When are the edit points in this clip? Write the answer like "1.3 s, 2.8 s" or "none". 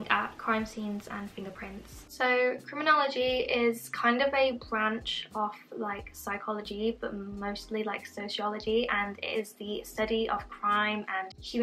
none